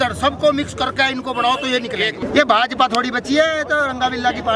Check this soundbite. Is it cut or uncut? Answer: cut